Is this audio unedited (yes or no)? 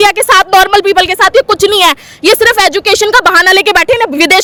yes